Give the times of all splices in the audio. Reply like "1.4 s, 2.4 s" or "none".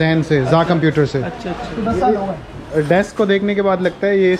1.7 s